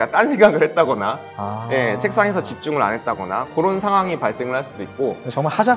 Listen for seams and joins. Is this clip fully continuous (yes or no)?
yes